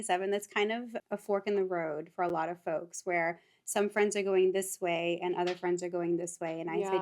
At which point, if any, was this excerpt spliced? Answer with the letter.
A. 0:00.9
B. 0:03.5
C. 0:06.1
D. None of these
A